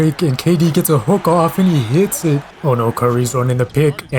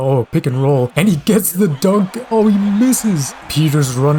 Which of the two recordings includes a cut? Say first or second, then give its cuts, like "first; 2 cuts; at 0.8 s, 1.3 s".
first; 1 cut; at 2.5 s